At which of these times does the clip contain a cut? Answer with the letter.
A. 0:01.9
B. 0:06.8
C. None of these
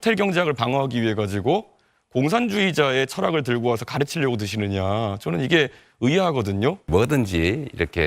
B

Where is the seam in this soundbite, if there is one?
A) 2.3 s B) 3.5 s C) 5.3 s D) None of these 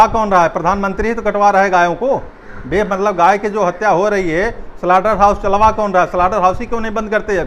D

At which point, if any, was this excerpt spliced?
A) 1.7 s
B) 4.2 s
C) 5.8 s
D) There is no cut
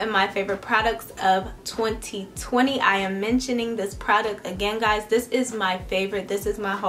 D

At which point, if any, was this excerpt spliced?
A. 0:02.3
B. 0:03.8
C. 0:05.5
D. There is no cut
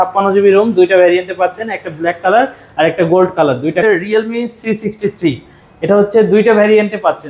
B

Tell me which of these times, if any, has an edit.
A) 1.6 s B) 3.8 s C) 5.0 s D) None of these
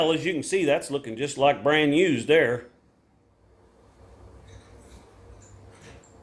D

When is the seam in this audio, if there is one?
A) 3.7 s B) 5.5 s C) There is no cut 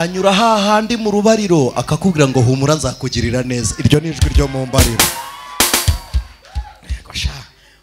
C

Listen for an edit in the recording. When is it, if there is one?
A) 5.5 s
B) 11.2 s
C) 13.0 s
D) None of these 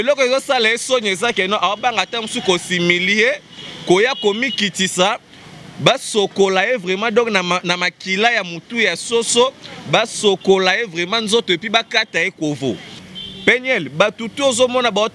C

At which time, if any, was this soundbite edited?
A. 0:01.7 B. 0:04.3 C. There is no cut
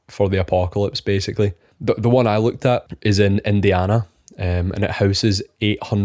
A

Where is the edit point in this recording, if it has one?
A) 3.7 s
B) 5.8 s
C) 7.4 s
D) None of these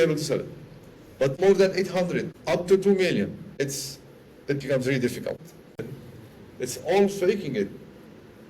B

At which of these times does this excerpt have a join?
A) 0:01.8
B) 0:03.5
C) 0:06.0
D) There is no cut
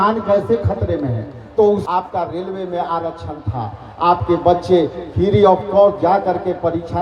A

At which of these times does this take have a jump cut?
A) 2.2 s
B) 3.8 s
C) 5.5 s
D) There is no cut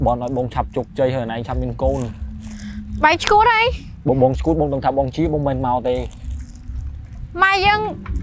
D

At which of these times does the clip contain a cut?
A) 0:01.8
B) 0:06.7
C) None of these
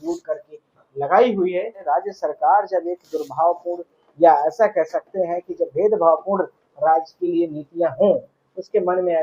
A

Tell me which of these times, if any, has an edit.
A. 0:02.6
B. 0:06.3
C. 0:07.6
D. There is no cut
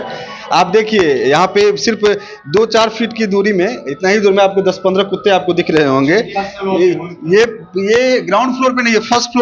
D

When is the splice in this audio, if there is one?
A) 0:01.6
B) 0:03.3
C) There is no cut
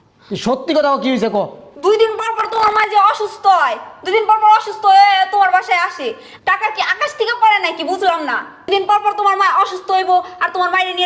A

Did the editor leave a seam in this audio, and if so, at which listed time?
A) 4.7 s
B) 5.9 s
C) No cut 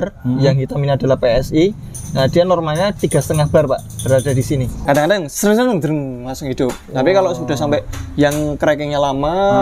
A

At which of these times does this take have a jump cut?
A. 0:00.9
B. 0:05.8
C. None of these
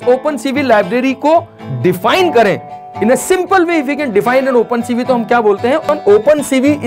B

